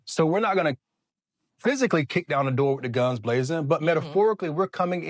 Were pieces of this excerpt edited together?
no; 0 cuts

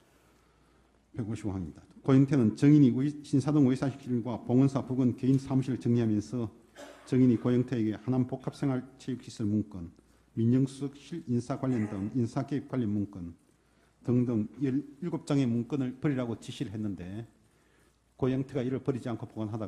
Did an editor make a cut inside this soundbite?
no; 0 cuts

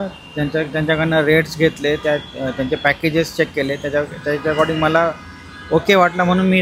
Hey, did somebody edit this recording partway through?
no; 0 cuts

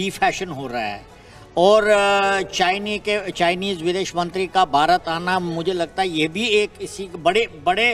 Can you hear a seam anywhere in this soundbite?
no; 0 cuts

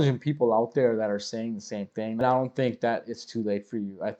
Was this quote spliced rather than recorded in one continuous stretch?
yes; 1 cut; at 2.2 s

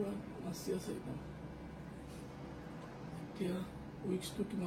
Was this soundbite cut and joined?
no; 0 cuts

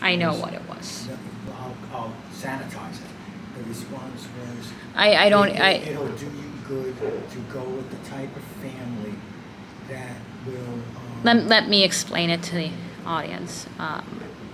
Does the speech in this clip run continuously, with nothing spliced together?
yes; 0 cuts

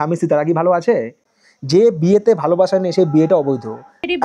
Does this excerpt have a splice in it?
yes; 1 cut; at 1.2 s

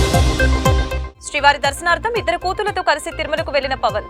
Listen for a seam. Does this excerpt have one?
yes; 1 cut; at 1.0 s

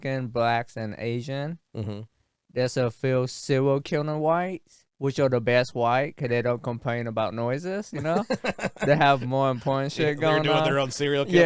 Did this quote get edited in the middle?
no; 0 cuts

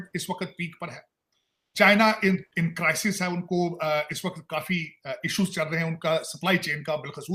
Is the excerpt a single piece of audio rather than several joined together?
yes; 0 cuts

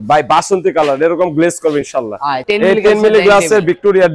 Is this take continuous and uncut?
no; 1 cut; at 2.5 s

